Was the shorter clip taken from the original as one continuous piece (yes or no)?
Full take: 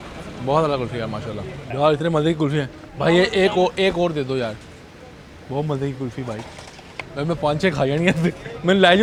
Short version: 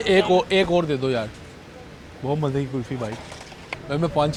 yes